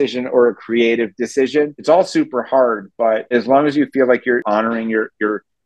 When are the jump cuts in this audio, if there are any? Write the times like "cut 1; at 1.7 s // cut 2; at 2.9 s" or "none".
cut 1; at 1.8 s // cut 2; at 3.3 s // cut 3; at 4.4 s